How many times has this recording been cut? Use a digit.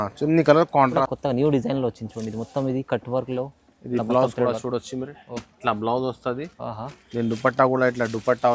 1